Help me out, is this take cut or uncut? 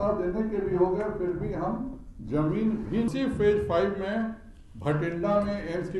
cut